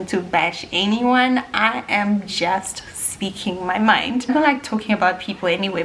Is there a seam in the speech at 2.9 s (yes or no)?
no